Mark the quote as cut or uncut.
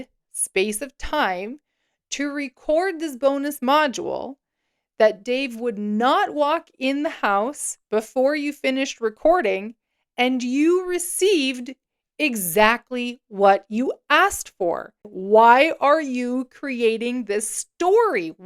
cut